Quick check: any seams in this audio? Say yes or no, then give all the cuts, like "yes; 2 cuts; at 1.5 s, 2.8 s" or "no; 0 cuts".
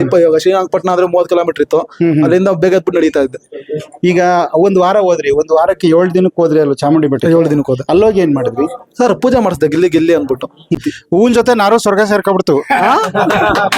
yes; 1 cut; at 10.8 s